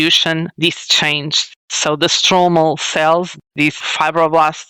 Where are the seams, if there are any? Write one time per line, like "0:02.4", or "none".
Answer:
none